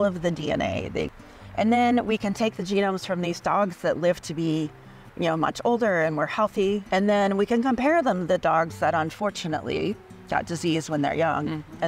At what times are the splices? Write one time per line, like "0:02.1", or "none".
0:01.2
0:06.8

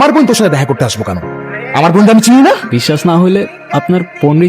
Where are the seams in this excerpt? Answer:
0:02.7
0:03.6

